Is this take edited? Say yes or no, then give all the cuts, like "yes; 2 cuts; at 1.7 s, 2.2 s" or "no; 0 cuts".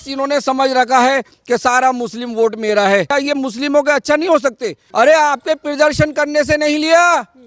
yes; 2 cuts; at 3.1 s, 4.8 s